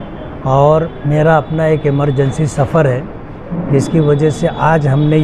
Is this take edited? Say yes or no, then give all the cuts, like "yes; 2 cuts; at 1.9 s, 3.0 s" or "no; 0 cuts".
no; 0 cuts